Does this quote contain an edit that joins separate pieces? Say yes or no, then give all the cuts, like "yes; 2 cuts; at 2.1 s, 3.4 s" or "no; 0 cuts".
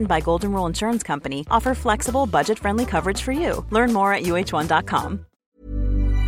yes; 1 cut; at 5.3 s